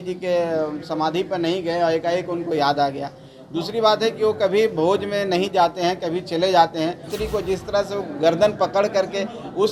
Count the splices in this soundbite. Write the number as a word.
one